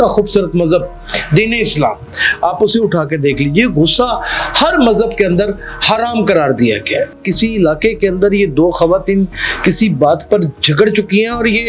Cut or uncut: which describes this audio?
cut